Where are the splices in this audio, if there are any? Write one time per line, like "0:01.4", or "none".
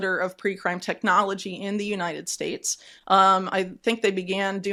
none